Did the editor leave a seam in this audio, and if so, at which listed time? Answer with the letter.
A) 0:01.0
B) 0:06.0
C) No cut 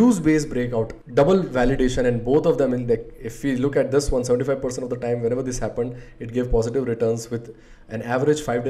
A